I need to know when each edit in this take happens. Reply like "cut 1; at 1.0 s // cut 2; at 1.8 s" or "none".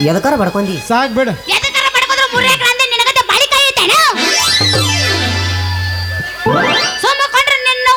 none